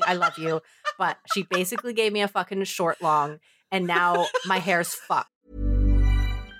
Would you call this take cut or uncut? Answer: cut